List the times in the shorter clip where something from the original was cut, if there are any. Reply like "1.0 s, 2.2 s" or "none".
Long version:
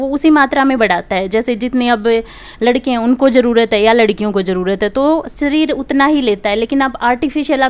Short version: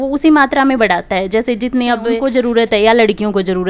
2.2 s